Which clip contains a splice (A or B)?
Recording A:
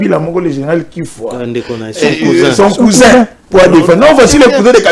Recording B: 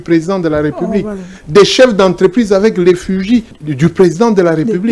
B